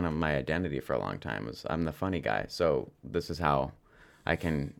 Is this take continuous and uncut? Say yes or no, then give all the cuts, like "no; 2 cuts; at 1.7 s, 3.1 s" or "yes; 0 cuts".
yes; 0 cuts